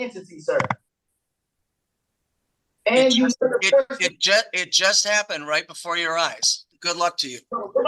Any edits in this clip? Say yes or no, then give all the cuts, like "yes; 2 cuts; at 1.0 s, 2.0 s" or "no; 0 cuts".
yes; 1 cut; at 6.7 s